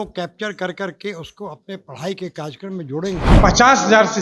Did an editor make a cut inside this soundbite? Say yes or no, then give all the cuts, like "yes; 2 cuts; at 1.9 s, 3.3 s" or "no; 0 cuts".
yes; 1 cut; at 3.3 s